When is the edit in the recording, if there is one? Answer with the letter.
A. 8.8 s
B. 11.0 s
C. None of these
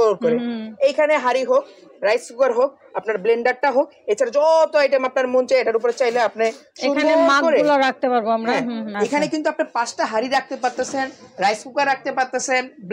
A